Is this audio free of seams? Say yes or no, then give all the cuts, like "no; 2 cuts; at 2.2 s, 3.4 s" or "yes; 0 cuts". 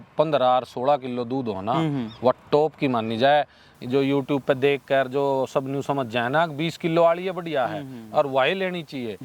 yes; 0 cuts